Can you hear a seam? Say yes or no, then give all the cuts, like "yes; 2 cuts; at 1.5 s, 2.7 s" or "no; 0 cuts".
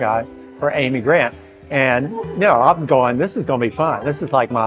no; 0 cuts